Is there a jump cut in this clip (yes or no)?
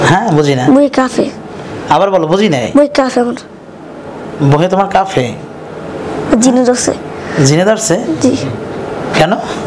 no